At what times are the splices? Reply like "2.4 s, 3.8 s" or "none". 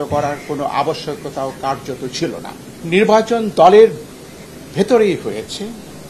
2.7 s